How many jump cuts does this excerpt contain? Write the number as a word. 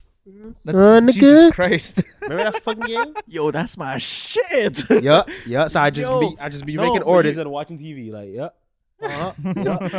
zero